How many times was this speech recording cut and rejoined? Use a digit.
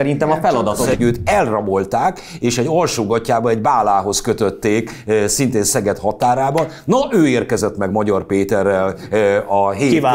1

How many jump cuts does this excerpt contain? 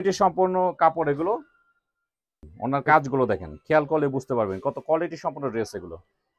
1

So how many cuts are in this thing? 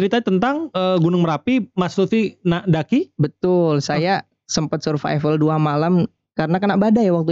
0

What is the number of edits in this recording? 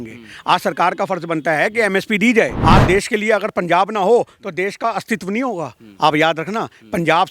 1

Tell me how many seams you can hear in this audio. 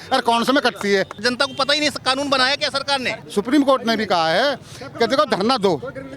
2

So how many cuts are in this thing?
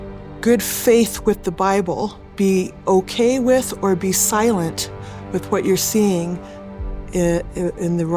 1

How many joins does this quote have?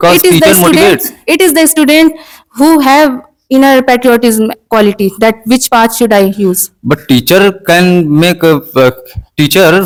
0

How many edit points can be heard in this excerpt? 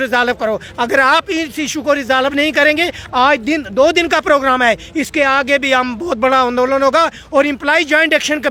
0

